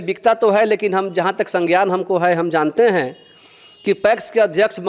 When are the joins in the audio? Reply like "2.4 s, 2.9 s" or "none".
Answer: none